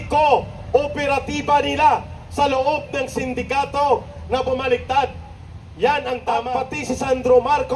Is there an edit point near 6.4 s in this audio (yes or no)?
yes